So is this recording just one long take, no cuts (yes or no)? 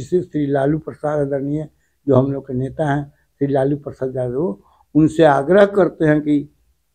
yes